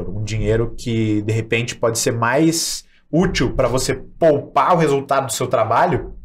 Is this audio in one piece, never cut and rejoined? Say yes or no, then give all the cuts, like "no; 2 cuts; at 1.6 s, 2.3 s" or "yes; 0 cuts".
yes; 0 cuts